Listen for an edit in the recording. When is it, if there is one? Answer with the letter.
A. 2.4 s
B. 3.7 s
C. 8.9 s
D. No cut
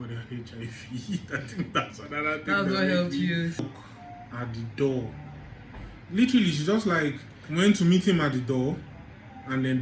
B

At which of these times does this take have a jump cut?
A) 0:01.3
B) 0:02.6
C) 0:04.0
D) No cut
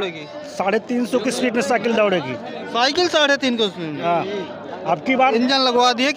D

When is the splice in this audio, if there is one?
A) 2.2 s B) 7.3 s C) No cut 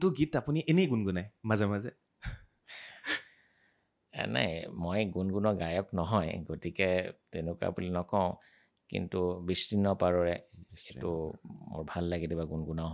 C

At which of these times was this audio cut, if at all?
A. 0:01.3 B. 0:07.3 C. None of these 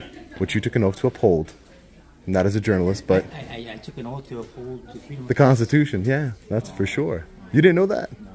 C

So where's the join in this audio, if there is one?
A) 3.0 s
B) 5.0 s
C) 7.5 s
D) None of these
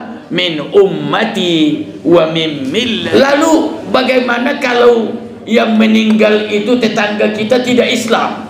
A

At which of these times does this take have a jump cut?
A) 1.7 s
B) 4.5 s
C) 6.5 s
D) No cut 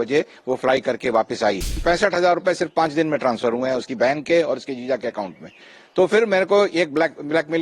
A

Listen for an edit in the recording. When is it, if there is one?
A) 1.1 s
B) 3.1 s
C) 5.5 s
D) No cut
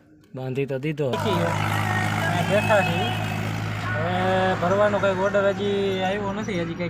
A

